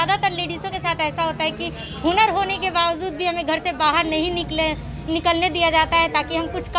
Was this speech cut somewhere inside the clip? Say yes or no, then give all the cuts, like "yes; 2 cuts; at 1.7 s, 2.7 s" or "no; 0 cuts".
no; 0 cuts